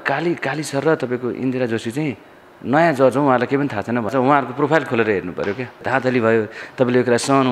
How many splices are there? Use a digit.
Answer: 2